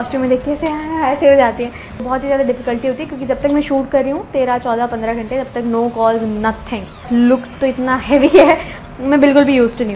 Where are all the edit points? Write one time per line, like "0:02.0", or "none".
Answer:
0:02.0
0:07.1